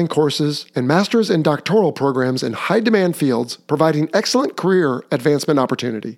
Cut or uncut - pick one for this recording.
uncut